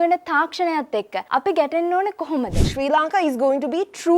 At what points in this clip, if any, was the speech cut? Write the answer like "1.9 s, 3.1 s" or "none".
1.2 s, 2.7 s